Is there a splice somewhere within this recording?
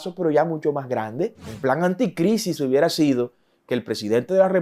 yes; 1 cut; at 1.4 s

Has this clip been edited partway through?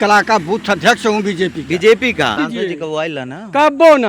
yes; 1 cut; at 2.4 s

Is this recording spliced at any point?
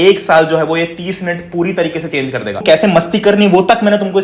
yes; 1 cut; at 2.6 s

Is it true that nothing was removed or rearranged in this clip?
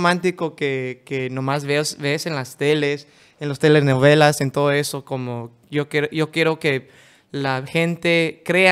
yes; 0 cuts

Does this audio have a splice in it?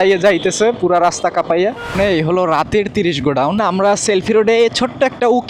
yes; 2 cuts; at 1.9 s, 3.6 s

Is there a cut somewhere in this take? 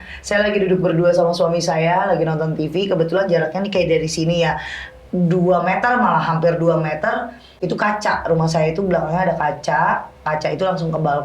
yes; 1 cut; at 7.6 s

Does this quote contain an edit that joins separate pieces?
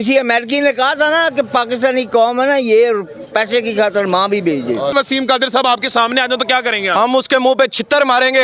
yes; 1 cut; at 4.9 s

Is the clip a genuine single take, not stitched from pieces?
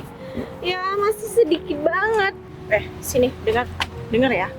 no; 1 cut; at 2.4 s

